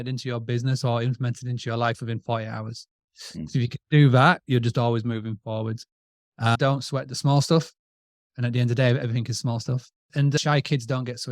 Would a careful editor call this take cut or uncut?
cut